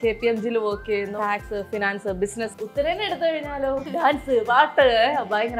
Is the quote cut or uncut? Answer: cut